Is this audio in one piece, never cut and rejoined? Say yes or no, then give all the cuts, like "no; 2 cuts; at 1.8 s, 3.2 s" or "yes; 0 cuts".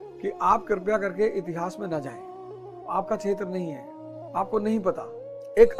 yes; 0 cuts